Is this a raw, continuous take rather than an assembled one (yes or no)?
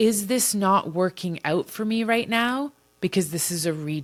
yes